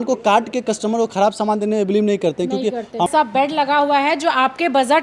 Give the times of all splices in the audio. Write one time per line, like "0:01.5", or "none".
0:03.1